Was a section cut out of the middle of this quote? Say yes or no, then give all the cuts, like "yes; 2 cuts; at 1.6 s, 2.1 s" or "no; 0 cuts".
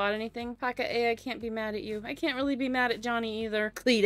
no; 0 cuts